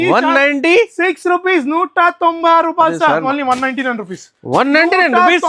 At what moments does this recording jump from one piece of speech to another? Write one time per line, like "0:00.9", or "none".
0:03.2